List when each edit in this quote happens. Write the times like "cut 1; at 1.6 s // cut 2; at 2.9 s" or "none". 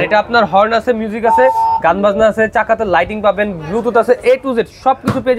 none